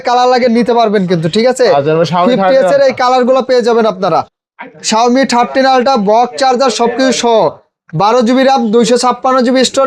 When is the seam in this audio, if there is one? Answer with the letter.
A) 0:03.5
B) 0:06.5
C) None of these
C